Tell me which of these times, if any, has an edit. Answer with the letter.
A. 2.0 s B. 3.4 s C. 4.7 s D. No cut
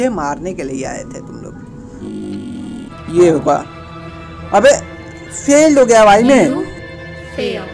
A